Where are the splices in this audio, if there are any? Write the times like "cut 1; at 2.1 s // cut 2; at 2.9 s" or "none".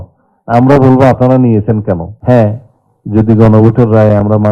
cut 1; at 2.1 s